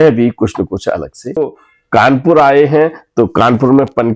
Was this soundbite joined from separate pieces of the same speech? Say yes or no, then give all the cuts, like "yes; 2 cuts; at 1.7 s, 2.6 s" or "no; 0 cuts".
yes; 1 cut; at 1.5 s